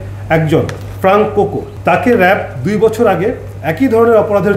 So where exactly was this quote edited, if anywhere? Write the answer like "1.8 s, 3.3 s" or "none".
1.7 s